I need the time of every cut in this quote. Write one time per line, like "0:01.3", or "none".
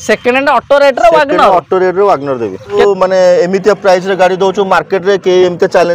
0:02.8